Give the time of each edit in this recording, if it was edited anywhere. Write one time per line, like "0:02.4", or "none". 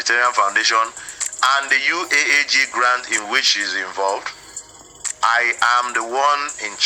none